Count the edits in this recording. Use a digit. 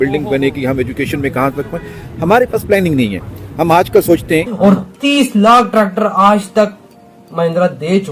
1